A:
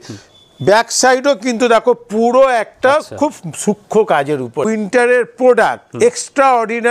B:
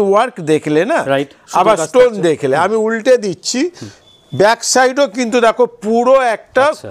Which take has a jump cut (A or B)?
A